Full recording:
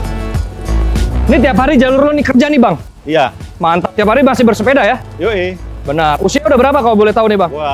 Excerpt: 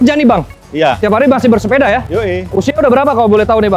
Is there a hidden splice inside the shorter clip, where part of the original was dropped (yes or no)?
yes